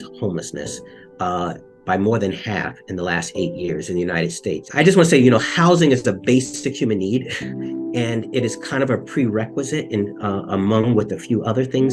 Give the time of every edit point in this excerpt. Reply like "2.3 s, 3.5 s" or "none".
4.6 s